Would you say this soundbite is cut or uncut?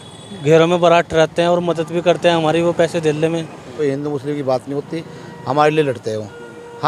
cut